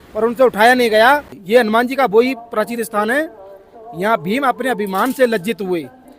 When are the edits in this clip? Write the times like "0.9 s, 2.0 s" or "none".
1.3 s